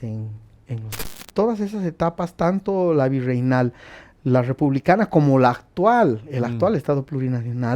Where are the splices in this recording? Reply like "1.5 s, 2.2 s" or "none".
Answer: 1.2 s